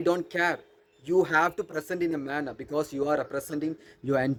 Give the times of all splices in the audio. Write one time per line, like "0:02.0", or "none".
none